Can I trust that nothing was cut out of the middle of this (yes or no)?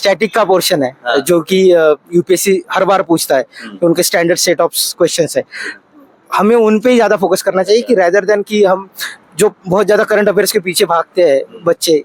yes